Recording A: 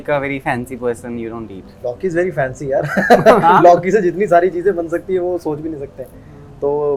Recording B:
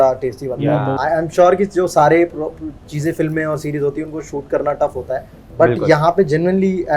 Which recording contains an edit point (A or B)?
B